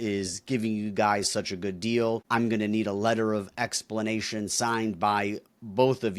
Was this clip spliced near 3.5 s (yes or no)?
no